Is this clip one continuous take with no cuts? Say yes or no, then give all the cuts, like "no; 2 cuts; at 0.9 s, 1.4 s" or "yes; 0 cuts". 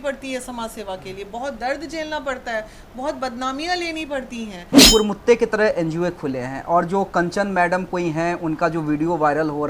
no; 1 cut; at 4.8 s